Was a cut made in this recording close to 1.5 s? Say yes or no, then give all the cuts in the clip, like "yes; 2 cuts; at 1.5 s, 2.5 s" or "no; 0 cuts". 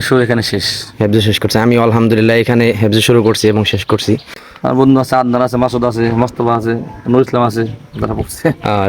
no; 1 cut; at 4.3 s